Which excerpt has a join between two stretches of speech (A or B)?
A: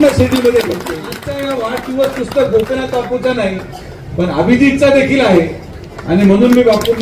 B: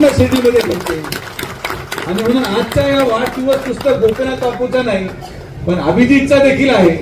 A